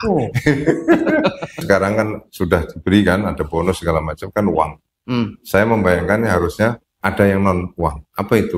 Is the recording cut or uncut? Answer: cut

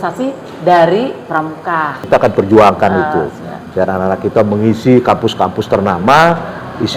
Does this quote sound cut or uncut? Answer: cut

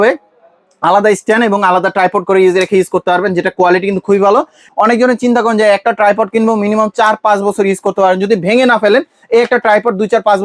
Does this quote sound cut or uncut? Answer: cut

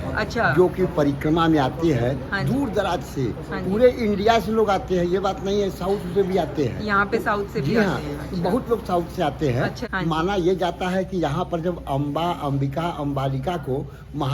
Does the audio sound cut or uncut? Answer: uncut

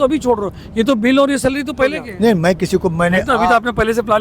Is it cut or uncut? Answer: cut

